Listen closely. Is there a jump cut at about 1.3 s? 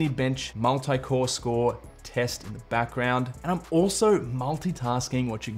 no; 1 cut; at 3.4 s

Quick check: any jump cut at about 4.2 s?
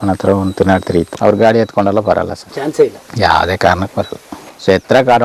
no; 2 cuts; at 1.1 s, 2.4 s

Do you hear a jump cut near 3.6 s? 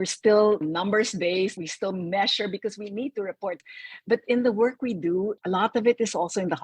yes; 1 cut; at 3.6 s

